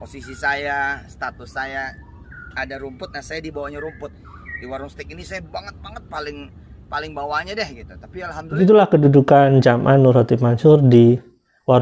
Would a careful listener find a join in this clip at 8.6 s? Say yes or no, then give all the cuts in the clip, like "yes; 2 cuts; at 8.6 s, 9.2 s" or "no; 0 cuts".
yes; 1 cut; at 8.6 s